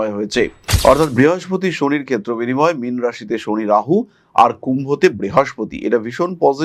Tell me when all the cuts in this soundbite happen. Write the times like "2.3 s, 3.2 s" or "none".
none